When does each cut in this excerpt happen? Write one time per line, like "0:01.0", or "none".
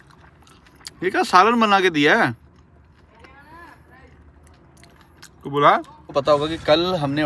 0:05.9